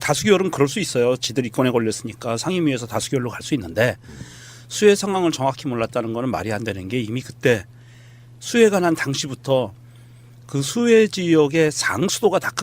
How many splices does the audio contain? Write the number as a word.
one